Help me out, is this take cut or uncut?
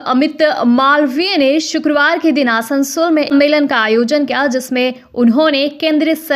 cut